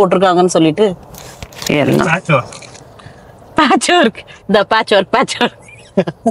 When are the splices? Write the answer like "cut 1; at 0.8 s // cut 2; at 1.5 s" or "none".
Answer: none